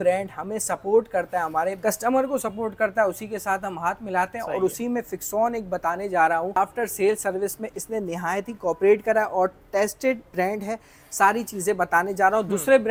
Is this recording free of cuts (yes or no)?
yes